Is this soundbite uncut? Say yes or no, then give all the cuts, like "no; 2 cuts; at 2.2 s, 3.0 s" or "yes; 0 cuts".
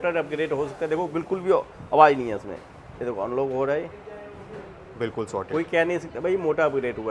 yes; 0 cuts